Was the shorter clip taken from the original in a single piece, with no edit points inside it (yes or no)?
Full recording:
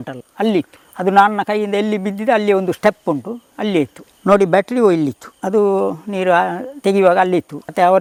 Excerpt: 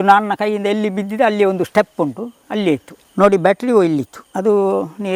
yes